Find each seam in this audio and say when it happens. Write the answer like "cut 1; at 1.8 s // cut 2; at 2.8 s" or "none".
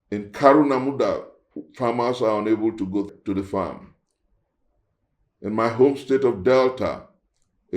cut 1; at 3.1 s

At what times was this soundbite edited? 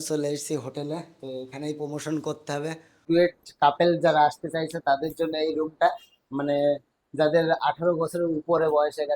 cut 1; at 3.0 s

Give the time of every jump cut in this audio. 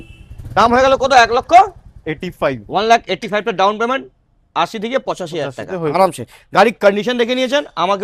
none

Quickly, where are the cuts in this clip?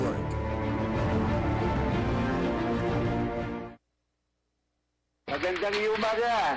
cut 1; at 4.5 s

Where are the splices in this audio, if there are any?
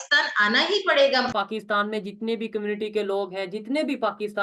cut 1; at 1.3 s

